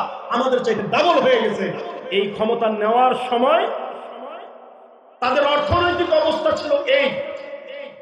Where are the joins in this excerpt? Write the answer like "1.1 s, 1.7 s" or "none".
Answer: 1.8 s